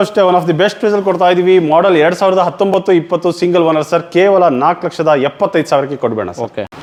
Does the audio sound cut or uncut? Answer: uncut